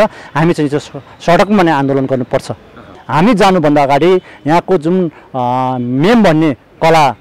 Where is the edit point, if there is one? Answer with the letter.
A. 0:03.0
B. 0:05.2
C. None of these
A